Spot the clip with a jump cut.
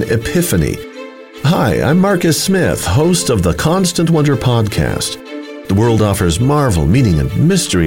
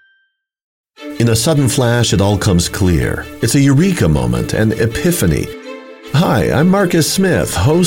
second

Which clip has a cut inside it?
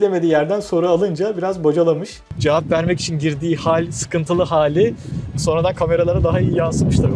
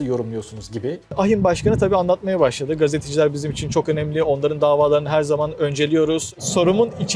second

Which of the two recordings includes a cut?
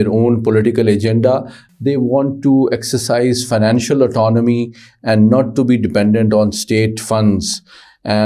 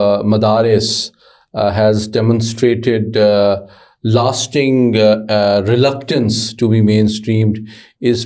first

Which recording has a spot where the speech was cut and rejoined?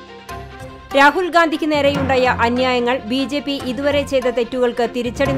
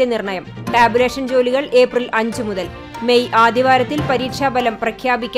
first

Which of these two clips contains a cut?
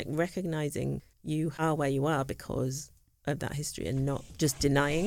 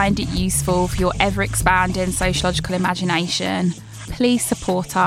first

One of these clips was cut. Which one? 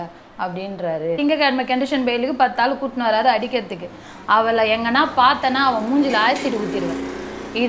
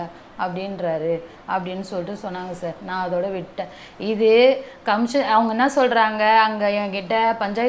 first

